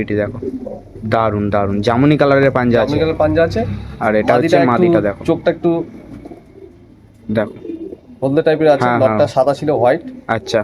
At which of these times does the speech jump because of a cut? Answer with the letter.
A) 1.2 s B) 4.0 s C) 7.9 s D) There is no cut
D